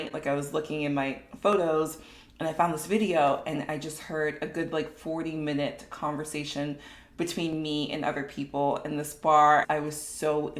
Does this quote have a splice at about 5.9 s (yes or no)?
no